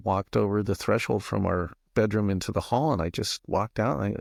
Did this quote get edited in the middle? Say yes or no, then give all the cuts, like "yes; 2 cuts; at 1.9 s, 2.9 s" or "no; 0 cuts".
no; 0 cuts